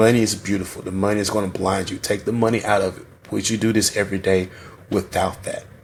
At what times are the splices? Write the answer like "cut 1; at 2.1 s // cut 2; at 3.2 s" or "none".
none